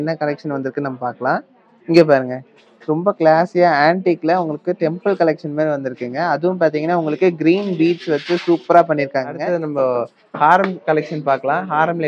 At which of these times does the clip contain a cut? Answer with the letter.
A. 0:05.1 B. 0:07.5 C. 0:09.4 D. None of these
C